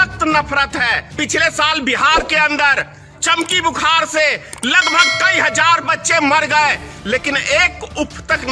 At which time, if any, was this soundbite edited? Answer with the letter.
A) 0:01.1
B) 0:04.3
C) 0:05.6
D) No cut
A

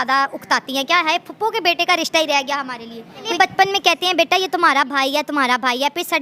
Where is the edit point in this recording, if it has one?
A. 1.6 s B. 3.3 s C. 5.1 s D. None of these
B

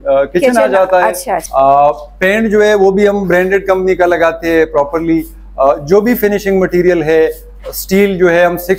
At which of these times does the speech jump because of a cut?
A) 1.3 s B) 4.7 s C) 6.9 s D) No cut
A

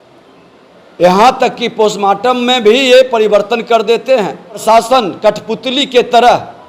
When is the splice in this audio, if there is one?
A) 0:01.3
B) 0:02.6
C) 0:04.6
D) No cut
C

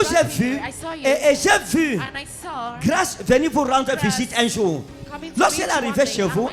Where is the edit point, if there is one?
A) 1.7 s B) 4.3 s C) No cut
C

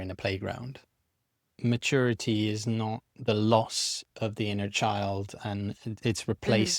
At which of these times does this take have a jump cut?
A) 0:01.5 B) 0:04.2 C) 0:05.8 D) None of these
A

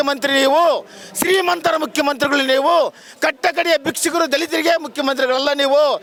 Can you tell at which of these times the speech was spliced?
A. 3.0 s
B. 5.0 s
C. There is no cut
C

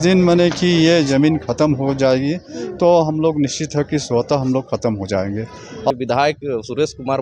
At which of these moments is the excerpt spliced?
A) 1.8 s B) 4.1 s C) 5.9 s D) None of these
C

